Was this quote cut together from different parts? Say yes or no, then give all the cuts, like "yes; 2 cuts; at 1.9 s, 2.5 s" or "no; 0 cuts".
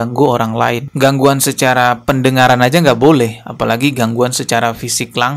no; 0 cuts